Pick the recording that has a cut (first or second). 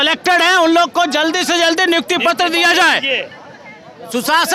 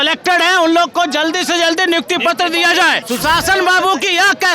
second